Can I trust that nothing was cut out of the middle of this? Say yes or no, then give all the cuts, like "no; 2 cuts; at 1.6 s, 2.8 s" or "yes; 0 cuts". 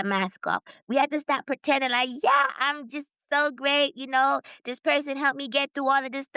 yes; 0 cuts